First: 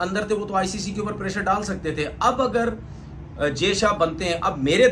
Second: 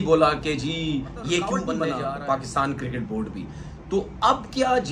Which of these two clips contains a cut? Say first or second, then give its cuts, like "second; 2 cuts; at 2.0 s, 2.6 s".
second; 1 cut; at 1.8 s